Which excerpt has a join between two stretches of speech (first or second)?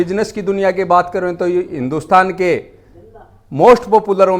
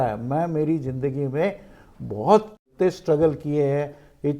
second